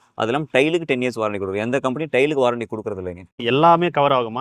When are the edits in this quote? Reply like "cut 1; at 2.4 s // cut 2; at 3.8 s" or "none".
cut 1; at 3.4 s